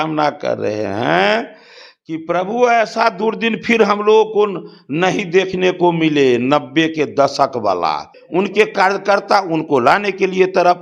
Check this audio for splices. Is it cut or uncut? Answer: cut